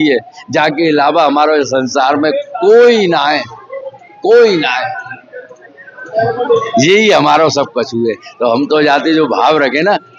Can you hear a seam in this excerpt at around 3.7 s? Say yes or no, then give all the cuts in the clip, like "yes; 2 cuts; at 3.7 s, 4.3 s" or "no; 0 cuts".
no; 0 cuts